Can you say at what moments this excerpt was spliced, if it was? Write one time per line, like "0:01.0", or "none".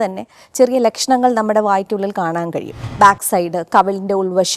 0:02.9